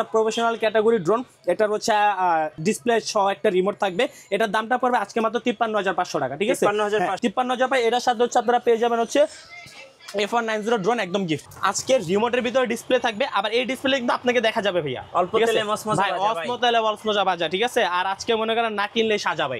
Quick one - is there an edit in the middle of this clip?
yes; 1 cut; at 11.5 s

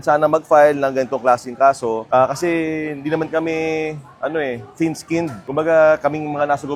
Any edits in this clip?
no; 0 cuts

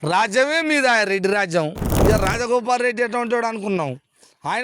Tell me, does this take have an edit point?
yes; 1 cut; at 1.9 s

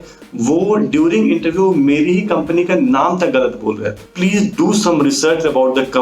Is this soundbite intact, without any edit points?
no; 1 cut; at 4.1 s

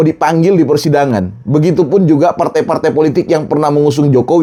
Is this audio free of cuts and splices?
yes; 0 cuts

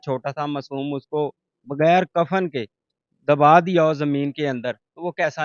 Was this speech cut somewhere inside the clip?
no; 0 cuts

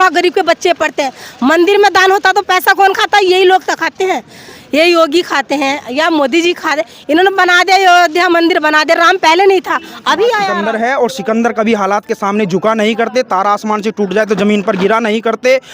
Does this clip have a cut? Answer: yes; 1 cut; at 10.6 s

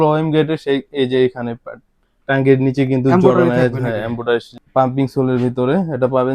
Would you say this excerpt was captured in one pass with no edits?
no; 1 cut; at 4.6 s

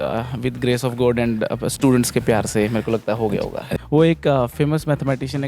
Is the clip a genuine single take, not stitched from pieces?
no; 1 cut; at 3.7 s

